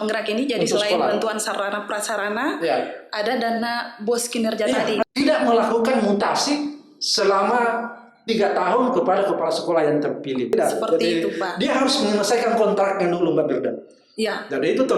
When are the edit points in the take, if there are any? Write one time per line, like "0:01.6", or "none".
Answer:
0:05.0
0:10.5

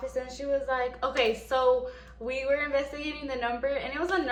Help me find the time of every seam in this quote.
none

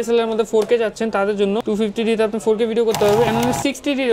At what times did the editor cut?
0:01.6
0:03.3

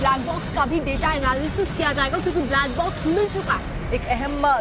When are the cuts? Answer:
0:01.1

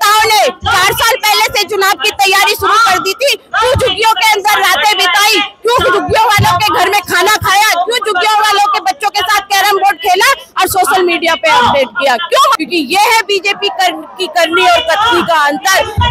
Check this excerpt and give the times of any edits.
0:12.6

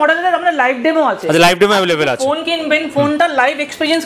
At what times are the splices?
none

